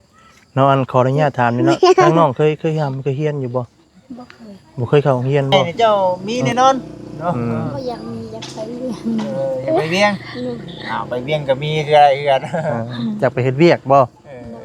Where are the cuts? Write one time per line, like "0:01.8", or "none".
0:05.5